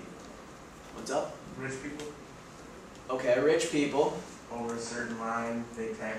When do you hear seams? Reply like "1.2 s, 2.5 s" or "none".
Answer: 3.4 s